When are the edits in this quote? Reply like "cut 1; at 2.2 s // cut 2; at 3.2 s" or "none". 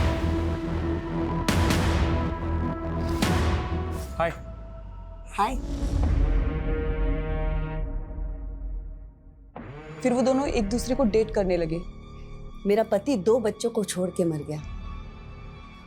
cut 1; at 3.9 s